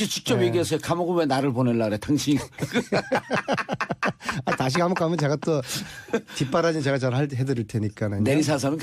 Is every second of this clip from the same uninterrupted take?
yes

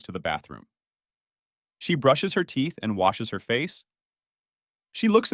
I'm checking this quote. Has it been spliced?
no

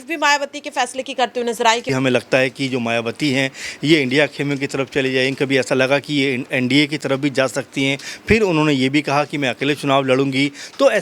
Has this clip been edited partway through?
yes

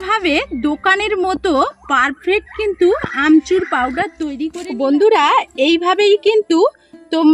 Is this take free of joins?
no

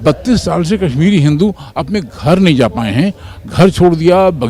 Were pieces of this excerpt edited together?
no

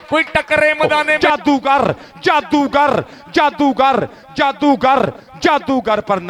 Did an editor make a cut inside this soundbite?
yes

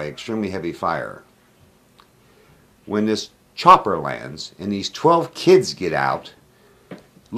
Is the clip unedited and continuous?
yes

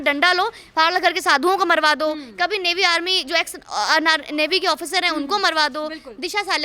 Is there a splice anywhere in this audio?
no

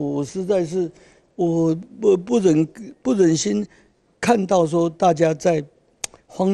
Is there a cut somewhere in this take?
no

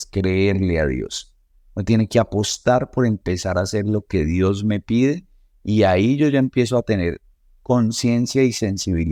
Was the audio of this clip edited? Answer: no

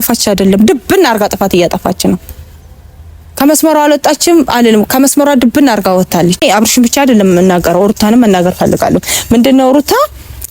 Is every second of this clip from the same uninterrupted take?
no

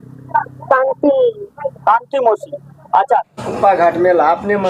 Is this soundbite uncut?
no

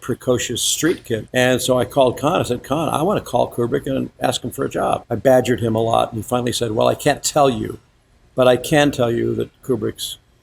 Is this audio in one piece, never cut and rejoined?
no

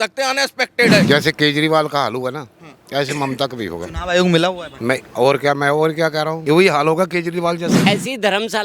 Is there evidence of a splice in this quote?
yes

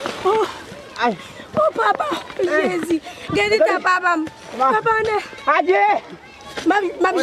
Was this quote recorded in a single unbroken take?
yes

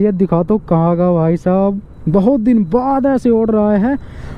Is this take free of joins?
yes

